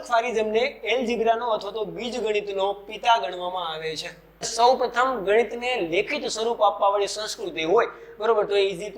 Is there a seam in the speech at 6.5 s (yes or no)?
no